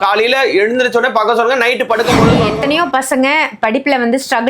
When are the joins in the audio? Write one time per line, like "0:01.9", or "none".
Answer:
0:02.4